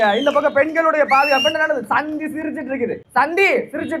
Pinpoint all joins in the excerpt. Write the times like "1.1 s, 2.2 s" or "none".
3.0 s